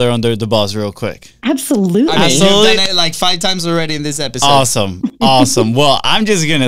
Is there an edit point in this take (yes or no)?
no